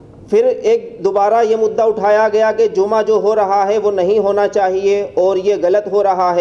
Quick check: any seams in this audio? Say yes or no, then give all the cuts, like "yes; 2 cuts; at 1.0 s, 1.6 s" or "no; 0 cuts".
no; 0 cuts